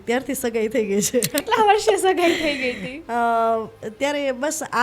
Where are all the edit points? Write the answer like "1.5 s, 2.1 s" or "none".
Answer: 1.4 s